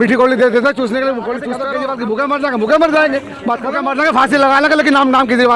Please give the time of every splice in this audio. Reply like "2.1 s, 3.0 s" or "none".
1.6 s, 3.8 s